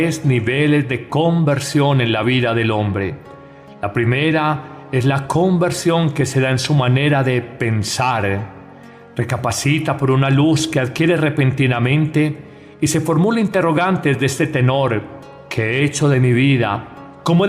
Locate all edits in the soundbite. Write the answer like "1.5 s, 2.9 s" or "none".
5.2 s